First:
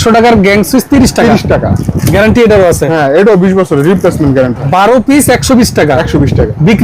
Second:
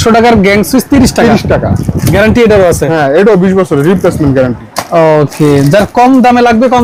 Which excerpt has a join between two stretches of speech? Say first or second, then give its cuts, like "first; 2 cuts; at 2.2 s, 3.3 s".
first; 1 cut; at 4.6 s